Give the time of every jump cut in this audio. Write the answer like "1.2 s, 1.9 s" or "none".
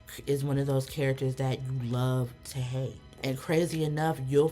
3.0 s